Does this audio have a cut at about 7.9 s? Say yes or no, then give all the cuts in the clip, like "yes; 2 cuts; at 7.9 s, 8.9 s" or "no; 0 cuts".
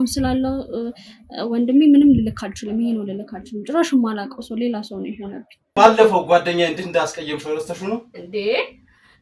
no; 1 cut; at 5.7 s